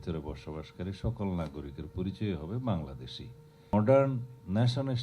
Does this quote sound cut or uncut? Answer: cut